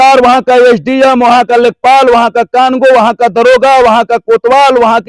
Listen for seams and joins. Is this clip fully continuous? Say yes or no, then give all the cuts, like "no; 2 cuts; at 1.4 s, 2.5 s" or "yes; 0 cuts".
yes; 0 cuts